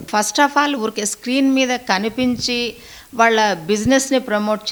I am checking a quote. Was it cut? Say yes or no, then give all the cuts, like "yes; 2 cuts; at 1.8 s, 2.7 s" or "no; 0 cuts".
no; 0 cuts